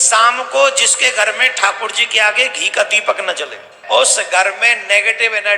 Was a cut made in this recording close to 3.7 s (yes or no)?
yes